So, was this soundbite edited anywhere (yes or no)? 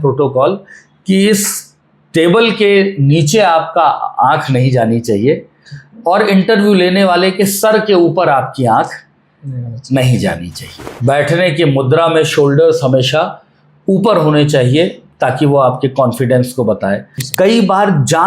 yes